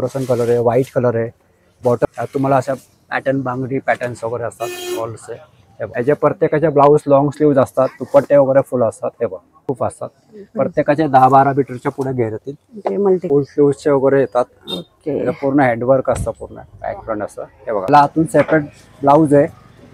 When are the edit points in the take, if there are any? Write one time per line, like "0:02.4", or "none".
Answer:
0:02.1
0:05.9
0:09.6
0:13.2
0:17.9

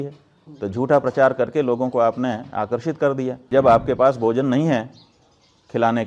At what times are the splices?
0:03.4

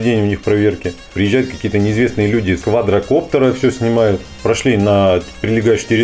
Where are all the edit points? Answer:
0:01.1
0:02.6
0:04.3

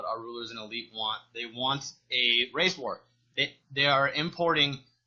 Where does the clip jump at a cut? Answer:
0:01.1

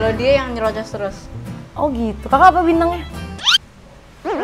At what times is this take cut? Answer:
none

